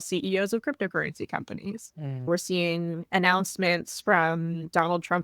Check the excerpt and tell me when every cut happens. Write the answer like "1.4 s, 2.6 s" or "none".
2.3 s